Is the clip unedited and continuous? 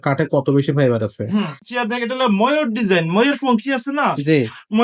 no; 1 cut; at 1.6 s

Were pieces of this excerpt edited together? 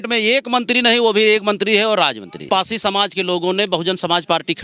yes; 1 cut; at 2.5 s

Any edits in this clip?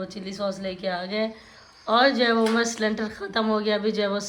no; 0 cuts

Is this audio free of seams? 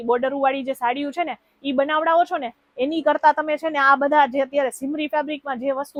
yes; 0 cuts

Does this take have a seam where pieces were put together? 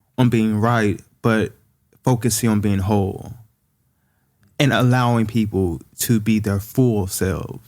no; 0 cuts

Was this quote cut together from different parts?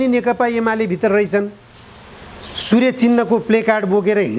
no; 0 cuts

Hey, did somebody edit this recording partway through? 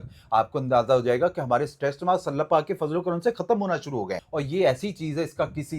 yes; 1 cut; at 4.2 s

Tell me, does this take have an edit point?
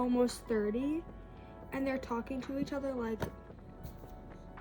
no; 0 cuts

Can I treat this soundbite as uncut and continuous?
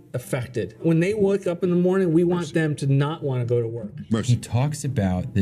yes; 0 cuts

